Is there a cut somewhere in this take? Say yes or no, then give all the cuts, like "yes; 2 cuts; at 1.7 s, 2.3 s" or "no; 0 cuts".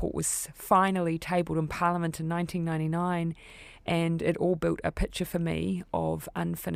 no; 0 cuts